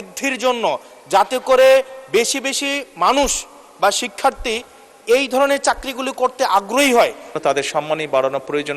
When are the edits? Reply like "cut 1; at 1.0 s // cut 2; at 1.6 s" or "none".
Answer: cut 1; at 7.3 s